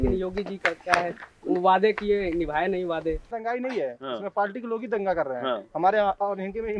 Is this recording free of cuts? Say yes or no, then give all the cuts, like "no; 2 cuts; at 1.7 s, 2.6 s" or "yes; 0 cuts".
no; 1 cut; at 3.3 s